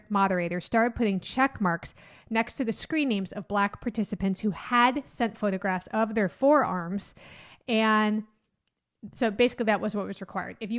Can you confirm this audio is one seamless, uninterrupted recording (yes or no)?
yes